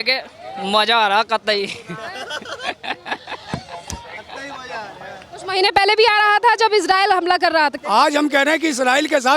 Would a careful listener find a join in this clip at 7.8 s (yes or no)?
yes